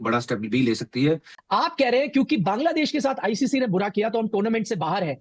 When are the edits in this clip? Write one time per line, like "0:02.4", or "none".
0:01.3